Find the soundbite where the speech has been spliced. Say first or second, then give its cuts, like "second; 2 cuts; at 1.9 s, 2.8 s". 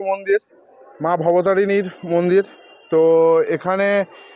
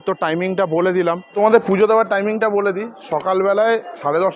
second; 1 cut; at 1.3 s